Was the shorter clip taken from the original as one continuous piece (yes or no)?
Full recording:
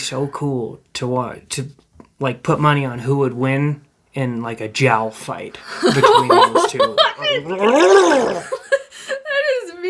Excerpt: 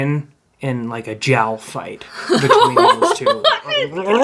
yes